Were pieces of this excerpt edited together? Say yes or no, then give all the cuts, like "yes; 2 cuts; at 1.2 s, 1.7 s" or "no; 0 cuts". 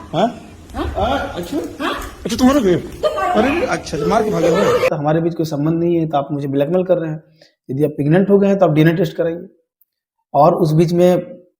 yes; 1 cut; at 4.9 s